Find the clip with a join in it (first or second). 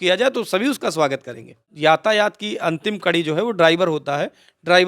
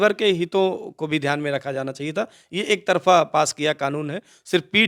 first